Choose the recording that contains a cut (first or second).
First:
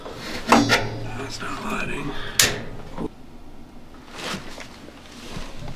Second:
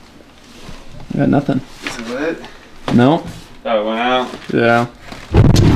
first